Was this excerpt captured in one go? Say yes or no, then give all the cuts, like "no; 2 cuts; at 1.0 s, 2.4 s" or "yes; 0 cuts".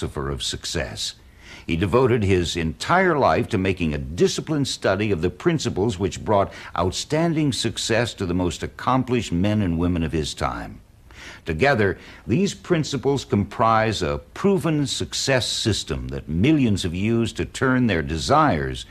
yes; 0 cuts